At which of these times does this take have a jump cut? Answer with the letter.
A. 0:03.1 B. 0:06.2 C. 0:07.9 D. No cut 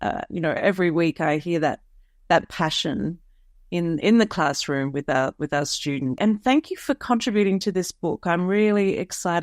B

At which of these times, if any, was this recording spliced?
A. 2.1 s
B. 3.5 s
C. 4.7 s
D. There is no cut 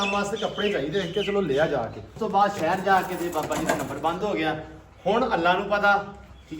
A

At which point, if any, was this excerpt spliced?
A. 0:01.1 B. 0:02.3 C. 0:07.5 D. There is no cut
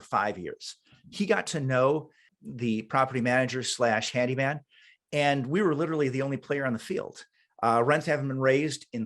B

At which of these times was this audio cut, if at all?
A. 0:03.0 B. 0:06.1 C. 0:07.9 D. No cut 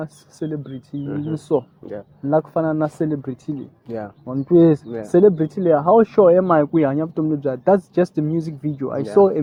D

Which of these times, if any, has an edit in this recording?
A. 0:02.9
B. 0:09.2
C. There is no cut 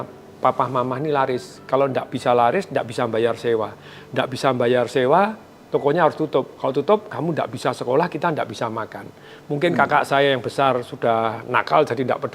C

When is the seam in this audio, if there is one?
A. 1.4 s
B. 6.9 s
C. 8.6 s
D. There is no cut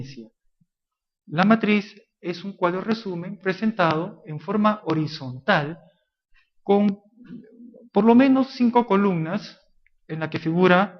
B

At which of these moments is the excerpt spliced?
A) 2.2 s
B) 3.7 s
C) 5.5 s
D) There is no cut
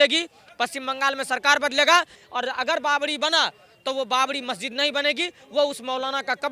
A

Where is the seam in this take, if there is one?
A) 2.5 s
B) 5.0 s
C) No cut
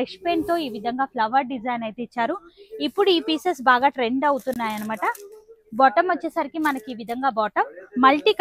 C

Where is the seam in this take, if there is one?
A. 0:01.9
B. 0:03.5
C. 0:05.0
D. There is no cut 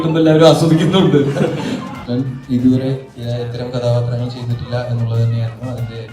A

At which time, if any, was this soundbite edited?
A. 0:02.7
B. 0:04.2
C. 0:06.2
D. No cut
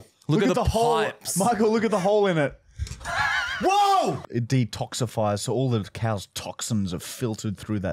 B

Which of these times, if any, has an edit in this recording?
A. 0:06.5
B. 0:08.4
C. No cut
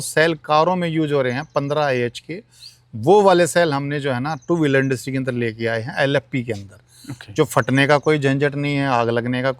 C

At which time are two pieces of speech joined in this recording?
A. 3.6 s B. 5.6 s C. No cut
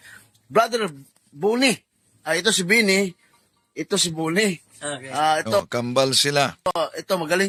C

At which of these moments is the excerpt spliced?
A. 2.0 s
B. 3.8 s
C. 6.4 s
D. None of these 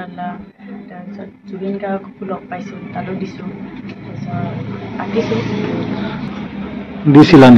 C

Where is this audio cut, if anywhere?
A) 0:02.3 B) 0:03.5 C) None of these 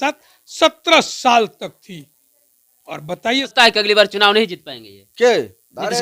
B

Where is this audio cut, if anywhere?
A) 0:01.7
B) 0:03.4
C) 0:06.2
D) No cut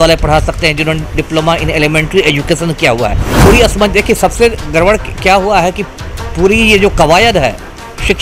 B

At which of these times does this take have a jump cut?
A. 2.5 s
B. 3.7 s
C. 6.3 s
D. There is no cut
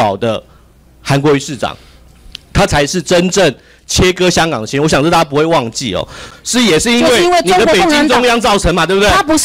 C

